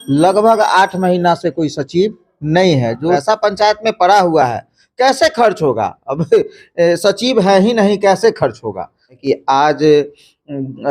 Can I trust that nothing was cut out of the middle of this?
no; 2 cuts; at 3.2 s, 9.1 s

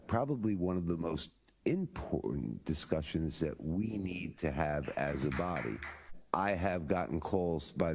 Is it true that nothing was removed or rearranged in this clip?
no; 1 cut; at 6.1 s

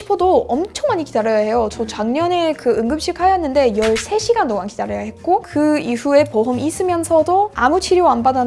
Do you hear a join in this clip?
no; 0 cuts

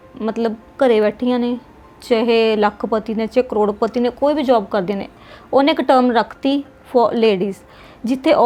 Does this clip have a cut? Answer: no; 0 cuts

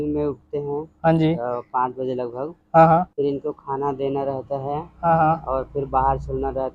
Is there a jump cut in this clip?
no; 0 cuts

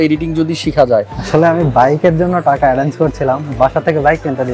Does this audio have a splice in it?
yes; 1 cut; at 1.2 s

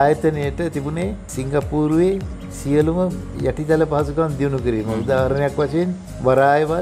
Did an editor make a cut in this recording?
no; 0 cuts

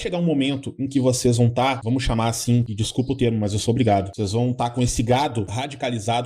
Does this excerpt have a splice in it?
no; 0 cuts

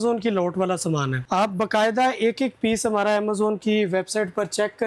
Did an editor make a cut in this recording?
yes; 1 cut; at 1.2 s

